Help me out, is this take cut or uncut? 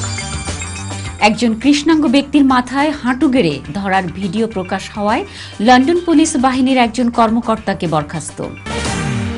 cut